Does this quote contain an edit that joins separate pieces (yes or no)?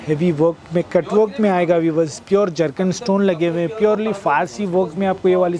no